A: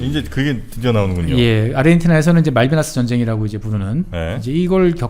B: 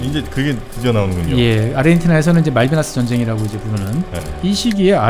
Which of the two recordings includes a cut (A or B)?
B